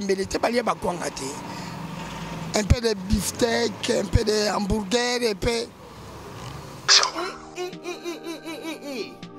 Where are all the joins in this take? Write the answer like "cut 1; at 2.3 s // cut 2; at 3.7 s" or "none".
cut 1; at 6.7 s